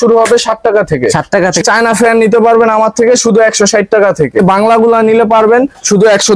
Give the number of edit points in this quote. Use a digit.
2